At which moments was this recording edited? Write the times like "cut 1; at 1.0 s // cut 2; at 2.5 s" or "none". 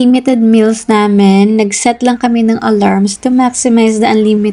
none

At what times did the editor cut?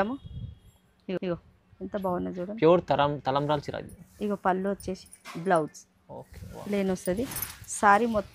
none

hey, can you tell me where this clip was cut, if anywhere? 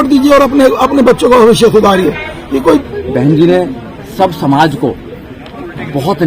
cut 1; at 2.9 s

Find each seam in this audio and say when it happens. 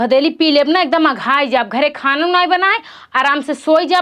none

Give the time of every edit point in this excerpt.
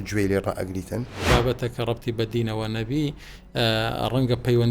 cut 1; at 1.3 s

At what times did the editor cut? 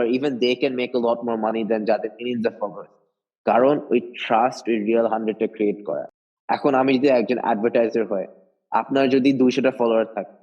none

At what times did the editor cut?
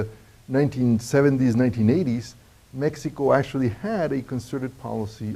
cut 1; at 1.6 s

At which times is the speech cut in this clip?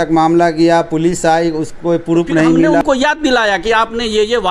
cut 1; at 2.8 s

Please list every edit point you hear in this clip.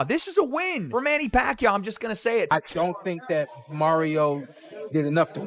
cut 1; at 2.5 s

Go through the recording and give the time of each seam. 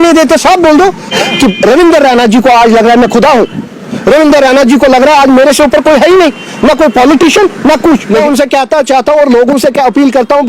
cut 1; at 1.2 s // cut 2; at 8.2 s

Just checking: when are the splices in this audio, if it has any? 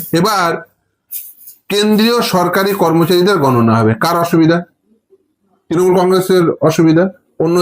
none

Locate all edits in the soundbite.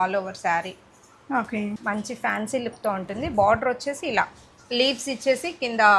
cut 1; at 1.7 s

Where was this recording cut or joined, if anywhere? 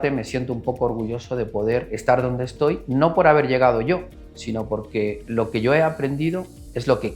cut 1; at 1.9 s // cut 2; at 2.8 s

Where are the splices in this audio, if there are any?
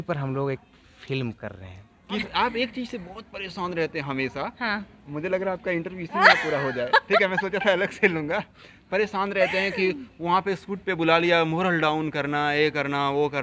cut 1; at 2.2 s

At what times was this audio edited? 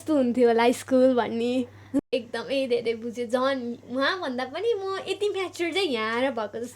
cut 1; at 2.0 s

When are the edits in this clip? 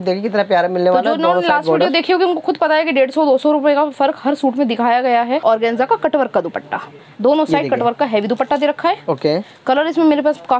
cut 1; at 5.4 s

